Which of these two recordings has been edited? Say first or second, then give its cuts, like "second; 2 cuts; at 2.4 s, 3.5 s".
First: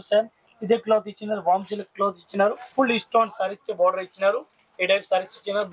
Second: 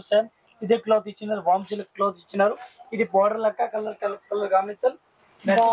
first; 1 cut; at 2.6 s